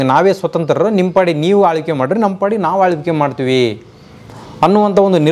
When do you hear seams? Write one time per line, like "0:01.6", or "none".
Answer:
none